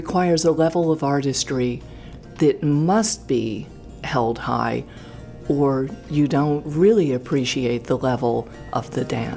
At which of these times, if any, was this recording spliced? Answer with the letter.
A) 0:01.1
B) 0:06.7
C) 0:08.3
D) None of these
B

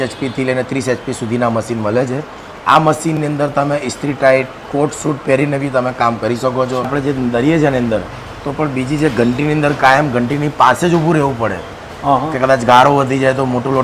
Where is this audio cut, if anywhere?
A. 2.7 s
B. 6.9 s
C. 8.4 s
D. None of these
B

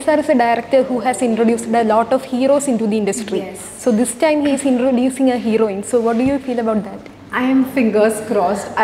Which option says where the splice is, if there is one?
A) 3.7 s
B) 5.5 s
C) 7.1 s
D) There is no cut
D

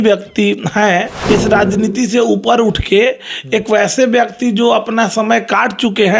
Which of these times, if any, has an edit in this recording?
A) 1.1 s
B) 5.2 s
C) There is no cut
A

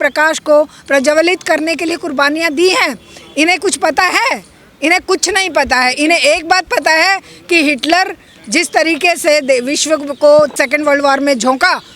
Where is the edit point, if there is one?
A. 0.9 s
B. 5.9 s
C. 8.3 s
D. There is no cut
D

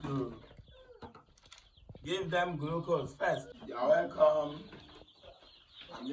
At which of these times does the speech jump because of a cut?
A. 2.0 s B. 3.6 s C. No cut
B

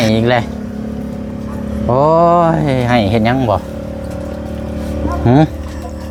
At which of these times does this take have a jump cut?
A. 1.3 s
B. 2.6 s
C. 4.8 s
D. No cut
D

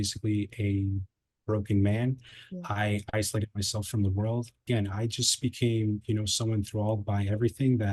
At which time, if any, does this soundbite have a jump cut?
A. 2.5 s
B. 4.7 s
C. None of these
B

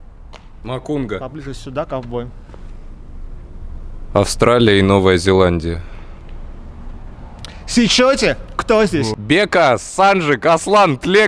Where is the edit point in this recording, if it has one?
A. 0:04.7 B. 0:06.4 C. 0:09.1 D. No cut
C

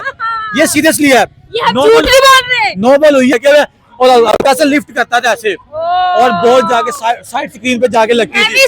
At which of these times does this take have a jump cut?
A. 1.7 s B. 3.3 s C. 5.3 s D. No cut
B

